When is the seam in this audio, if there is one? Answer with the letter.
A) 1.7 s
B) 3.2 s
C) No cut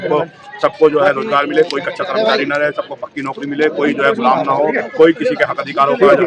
C